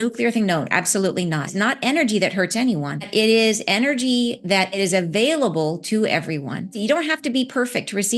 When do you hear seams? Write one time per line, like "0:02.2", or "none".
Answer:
0:01.5
0:03.1
0:04.8
0:06.8